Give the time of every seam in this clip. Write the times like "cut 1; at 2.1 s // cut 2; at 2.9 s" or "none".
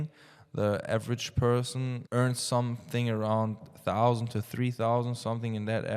cut 1; at 2.0 s